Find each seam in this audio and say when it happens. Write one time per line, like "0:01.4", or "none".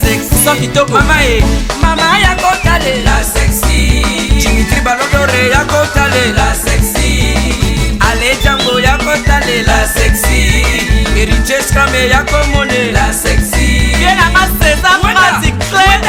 none